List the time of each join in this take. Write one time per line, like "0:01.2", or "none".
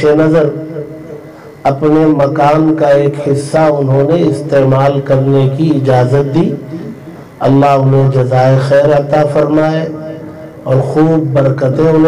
none